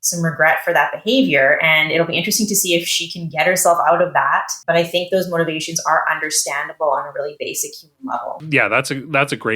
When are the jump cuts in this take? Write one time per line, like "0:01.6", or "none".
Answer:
0:04.5
0:08.4